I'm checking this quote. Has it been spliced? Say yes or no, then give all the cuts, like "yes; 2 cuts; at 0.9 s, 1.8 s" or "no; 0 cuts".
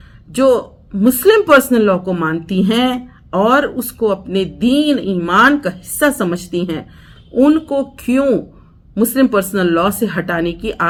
no; 0 cuts